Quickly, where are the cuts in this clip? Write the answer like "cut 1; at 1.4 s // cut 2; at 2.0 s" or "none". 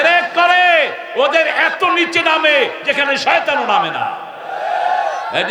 none

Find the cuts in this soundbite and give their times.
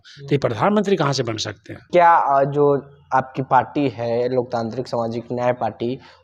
cut 1; at 1.8 s

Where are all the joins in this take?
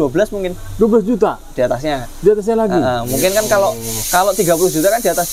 none

